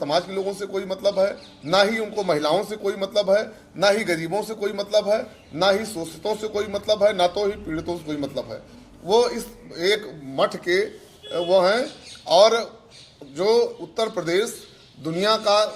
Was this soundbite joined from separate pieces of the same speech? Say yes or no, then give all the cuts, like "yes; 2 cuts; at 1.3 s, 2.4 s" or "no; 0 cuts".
no; 0 cuts